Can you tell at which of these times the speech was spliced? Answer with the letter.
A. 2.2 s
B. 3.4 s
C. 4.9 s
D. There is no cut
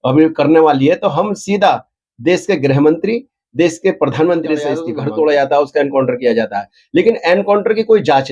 C